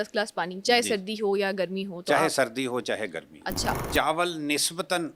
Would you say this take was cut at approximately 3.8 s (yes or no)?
yes